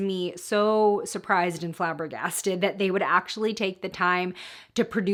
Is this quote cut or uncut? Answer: uncut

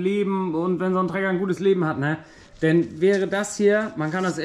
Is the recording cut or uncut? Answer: uncut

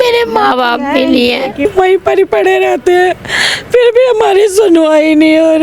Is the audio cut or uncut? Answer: cut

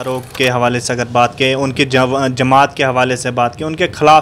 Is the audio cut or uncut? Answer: uncut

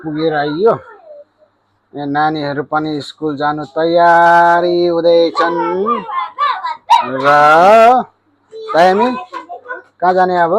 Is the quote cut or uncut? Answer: uncut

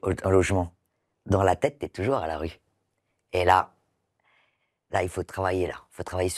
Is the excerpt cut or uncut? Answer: uncut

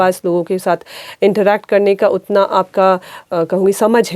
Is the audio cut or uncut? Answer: cut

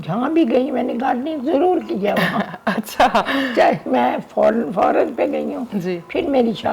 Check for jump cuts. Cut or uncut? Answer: uncut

